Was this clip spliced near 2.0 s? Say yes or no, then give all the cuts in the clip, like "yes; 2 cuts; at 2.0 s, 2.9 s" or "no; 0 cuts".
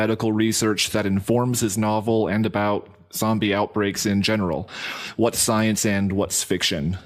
no; 1 cut; at 3.7 s